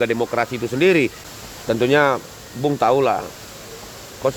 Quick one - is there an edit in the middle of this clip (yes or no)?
yes